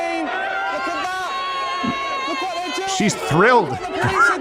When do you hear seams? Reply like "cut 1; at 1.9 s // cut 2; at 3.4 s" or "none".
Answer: none